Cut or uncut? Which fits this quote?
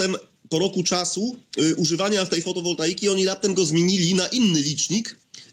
uncut